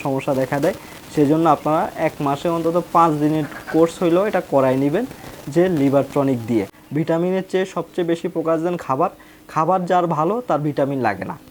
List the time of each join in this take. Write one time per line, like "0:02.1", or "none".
0:06.8